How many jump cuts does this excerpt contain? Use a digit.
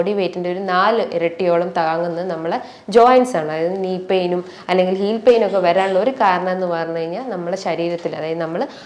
0